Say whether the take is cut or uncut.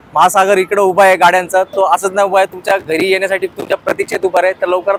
uncut